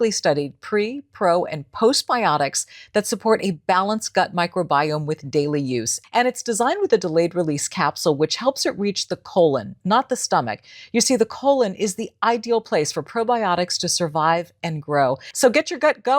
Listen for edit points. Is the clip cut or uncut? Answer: cut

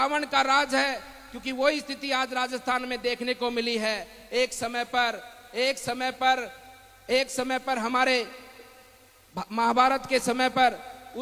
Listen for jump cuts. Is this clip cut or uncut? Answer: uncut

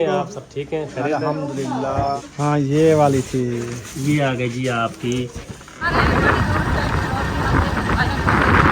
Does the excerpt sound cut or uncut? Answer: cut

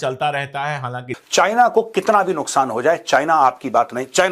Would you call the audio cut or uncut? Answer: cut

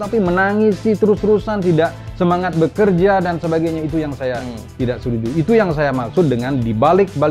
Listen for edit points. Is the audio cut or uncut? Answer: uncut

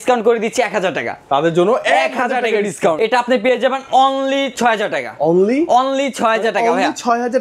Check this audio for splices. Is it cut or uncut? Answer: cut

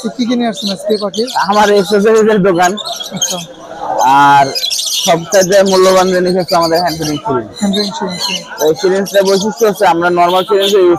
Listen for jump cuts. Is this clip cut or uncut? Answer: uncut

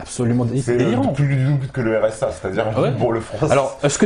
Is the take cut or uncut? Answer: uncut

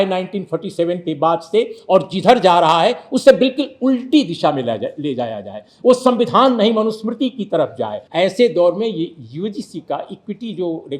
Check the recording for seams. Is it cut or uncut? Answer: cut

